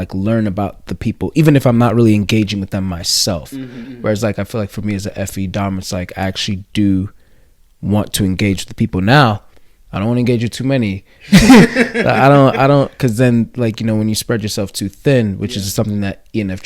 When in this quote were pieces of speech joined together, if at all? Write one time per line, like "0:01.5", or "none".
0:03.8

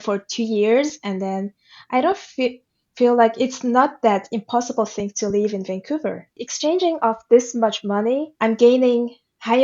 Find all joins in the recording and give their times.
0:06.3
0:08.3

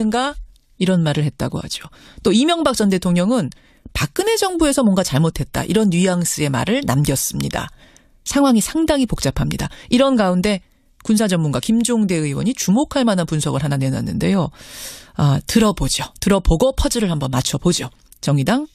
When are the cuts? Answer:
none

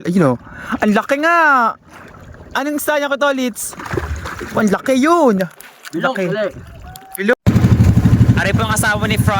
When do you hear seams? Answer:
0:07.3

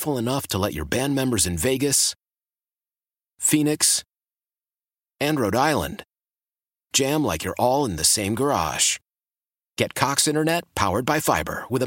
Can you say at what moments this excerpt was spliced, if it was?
none

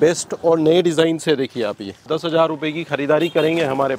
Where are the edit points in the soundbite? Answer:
0:02.0

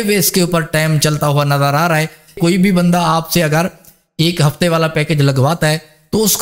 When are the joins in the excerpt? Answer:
0:02.3

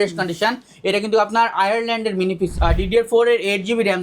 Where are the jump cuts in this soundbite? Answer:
0:02.5

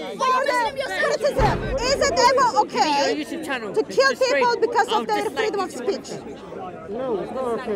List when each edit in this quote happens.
0:01.7

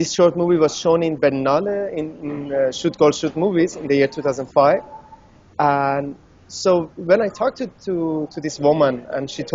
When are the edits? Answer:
0:01.4

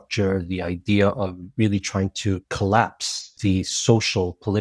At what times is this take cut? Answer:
0:02.5
0:03.3

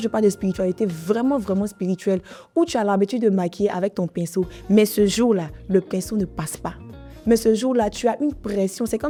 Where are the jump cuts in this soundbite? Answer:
none

